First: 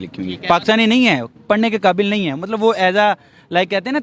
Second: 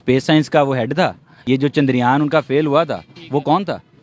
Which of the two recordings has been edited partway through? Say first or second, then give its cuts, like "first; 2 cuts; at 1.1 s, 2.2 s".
second; 1 cut; at 1.3 s